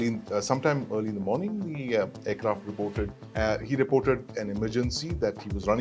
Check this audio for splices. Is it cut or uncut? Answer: cut